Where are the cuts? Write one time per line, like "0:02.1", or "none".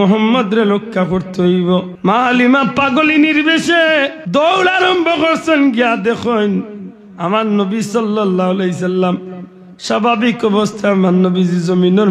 0:01.9
0:04.2

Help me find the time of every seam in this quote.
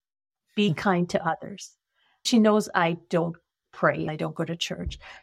0:02.3
0:04.1

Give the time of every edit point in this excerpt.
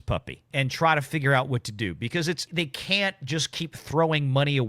0:02.4

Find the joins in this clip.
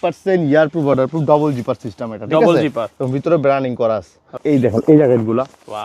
0:04.3

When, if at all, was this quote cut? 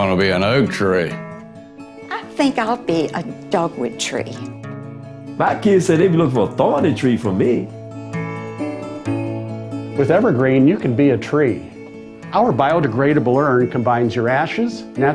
none

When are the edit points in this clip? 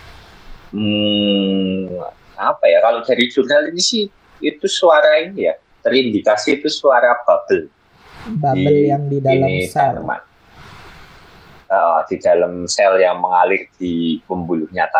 none

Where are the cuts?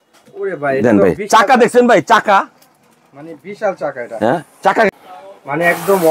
0:04.9

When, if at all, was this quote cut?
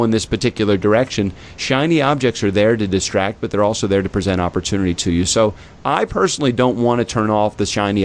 none

